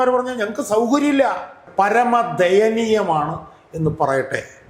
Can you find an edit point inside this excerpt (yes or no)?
yes